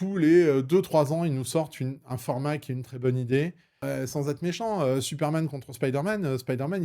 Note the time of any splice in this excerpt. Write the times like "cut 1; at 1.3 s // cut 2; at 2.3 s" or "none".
cut 1; at 3.8 s